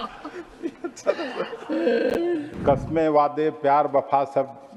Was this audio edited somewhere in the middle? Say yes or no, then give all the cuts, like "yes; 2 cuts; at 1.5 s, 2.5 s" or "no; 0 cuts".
yes; 1 cut; at 2.5 s